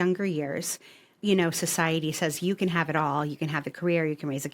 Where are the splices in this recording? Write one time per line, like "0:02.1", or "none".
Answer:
0:01.1